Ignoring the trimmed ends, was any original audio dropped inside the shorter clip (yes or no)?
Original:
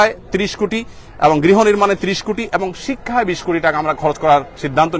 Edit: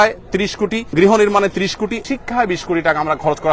yes